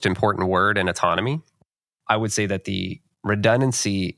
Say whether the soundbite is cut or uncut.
cut